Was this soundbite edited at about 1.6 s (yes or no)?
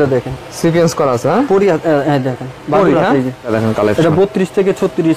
no